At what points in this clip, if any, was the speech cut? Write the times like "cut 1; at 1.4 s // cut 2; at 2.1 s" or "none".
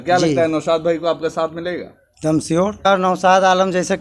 cut 1; at 2.9 s